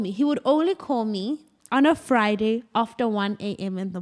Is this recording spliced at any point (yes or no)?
no